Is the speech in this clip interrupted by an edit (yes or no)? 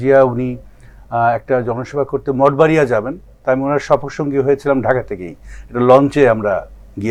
no